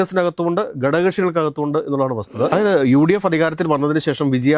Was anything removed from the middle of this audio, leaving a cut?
yes; 1 cut; at 2.5 s

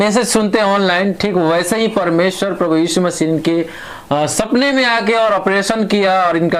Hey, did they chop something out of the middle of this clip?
no; 0 cuts

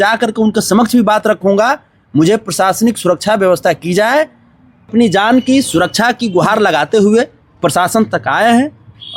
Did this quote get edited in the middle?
yes; 1 cut; at 4.9 s

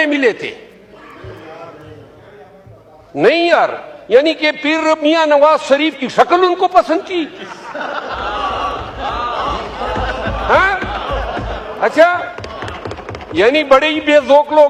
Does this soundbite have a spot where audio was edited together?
no; 0 cuts

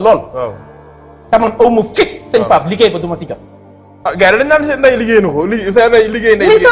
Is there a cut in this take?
no; 0 cuts

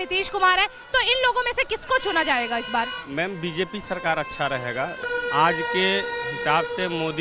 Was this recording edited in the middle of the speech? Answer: yes; 1 cut; at 5.0 s

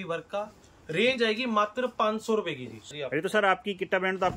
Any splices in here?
yes; 1 cut; at 2.9 s

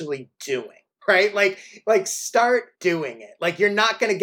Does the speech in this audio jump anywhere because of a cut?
yes; 2 cuts; at 0.9 s, 2.7 s

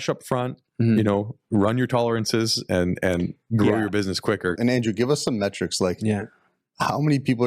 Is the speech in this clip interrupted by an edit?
yes; 1 cut; at 4.6 s

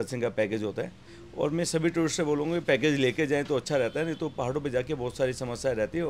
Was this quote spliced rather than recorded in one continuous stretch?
no; 0 cuts

